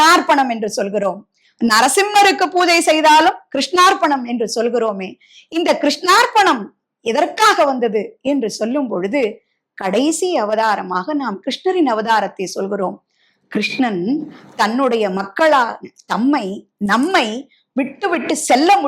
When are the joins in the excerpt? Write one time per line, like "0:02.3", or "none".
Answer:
none